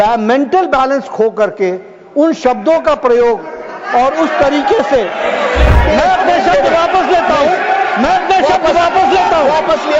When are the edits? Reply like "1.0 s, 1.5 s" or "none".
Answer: 5.8 s